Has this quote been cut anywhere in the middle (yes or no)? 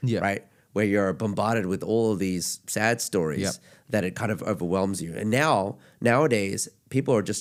no